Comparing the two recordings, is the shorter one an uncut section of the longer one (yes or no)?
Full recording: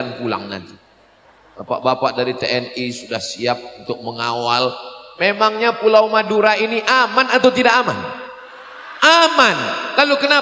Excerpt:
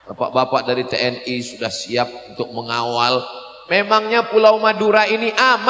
yes